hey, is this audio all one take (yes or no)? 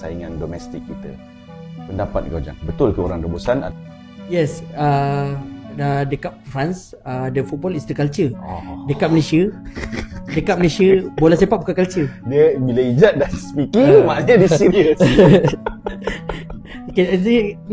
yes